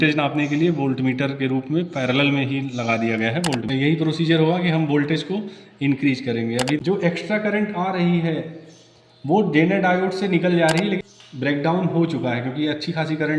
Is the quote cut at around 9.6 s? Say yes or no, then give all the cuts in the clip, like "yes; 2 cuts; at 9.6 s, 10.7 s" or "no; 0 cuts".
no; 3 cuts; at 3.6 s, 6.8 s, 11.0 s